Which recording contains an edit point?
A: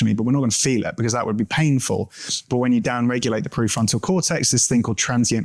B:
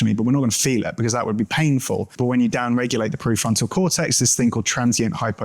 B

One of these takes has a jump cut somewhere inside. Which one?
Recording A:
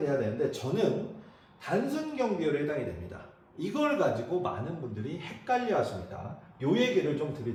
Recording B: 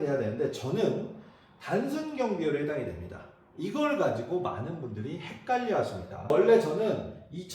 B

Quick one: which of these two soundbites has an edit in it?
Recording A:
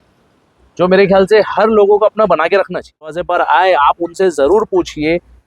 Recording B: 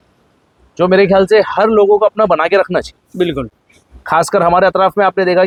A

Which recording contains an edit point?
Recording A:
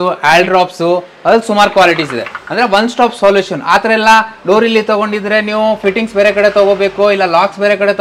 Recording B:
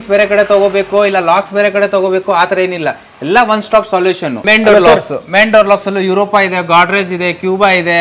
B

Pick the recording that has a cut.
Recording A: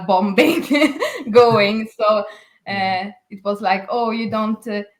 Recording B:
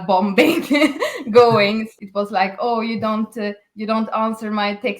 B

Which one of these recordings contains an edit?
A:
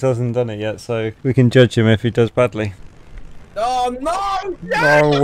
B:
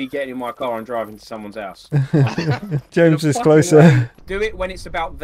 B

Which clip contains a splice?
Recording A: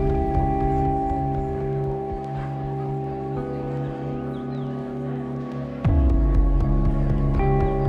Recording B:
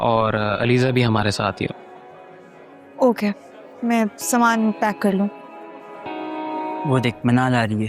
B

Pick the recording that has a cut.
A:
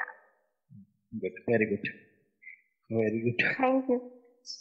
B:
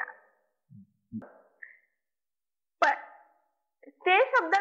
B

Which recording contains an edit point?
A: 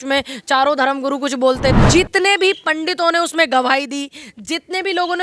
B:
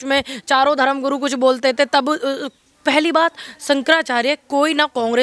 A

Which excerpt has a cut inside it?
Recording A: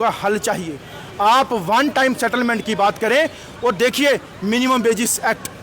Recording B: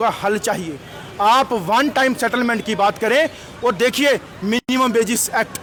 A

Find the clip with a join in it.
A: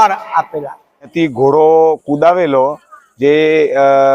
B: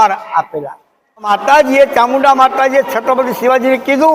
A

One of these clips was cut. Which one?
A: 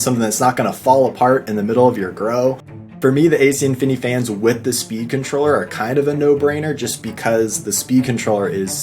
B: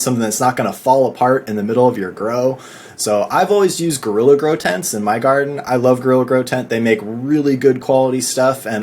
A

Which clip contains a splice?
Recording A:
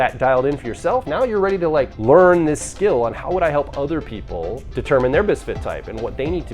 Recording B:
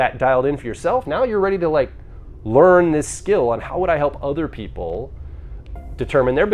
A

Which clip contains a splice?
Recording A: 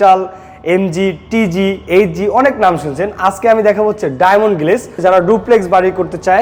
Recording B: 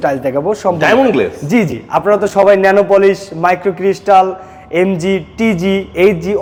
A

